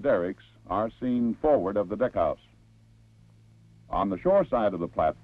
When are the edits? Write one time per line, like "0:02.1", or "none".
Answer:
none